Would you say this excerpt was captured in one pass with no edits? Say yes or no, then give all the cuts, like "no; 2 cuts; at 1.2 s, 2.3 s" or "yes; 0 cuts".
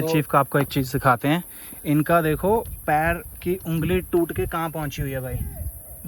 yes; 0 cuts